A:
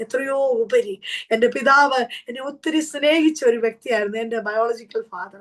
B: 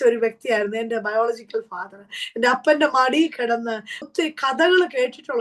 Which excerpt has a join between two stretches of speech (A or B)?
B